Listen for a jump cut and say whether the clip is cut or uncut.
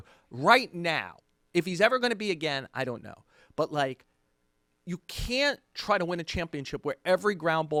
uncut